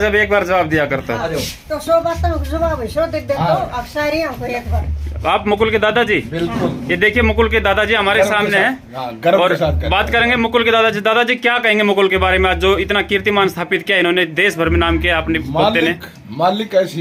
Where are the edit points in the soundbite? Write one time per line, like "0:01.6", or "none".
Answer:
none